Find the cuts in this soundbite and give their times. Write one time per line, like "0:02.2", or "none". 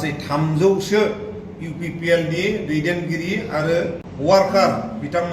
0:04.1